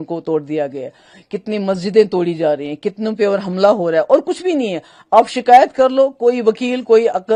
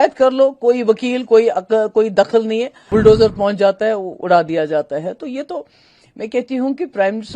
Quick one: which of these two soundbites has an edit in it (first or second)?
second